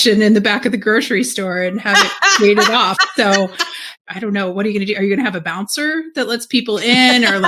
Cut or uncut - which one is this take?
cut